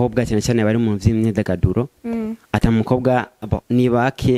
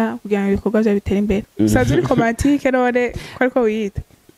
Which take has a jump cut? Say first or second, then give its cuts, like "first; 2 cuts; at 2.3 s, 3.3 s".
second; 1 cut; at 1.5 s